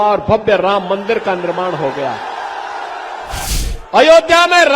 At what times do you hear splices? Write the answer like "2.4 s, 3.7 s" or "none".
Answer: 3.5 s